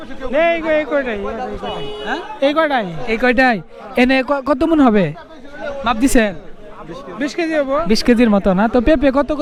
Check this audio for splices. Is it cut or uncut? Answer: uncut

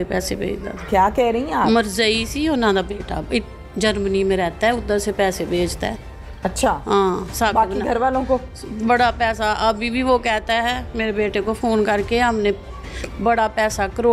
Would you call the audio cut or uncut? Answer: uncut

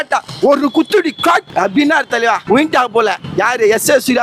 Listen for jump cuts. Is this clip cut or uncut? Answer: cut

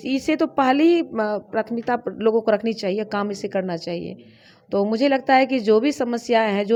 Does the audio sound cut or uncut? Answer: uncut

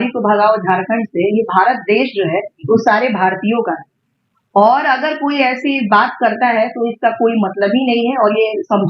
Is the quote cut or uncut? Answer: uncut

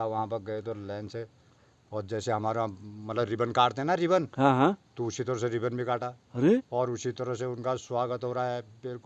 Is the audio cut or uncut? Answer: uncut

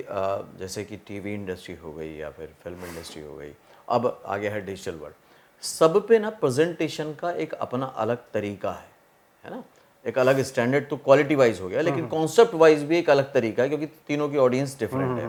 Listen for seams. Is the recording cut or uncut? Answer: uncut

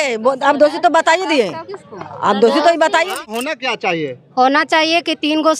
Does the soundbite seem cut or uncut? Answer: cut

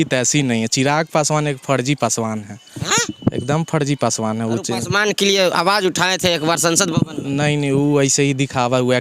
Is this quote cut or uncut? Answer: uncut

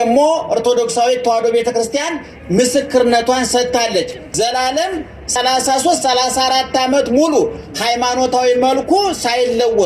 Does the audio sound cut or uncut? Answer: cut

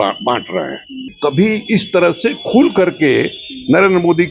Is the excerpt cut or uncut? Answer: cut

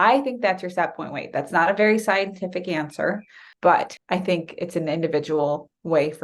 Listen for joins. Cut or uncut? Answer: cut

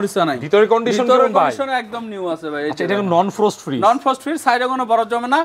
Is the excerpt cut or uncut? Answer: uncut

